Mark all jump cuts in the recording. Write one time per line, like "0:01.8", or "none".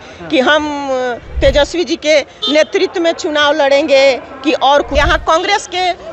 0:04.9